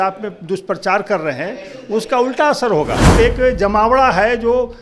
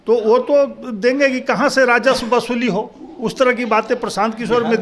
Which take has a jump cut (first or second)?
first